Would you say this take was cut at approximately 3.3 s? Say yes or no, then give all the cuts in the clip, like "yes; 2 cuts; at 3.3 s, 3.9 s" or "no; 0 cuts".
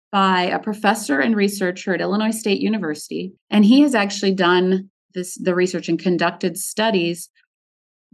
yes; 1 cut; at 3.3 s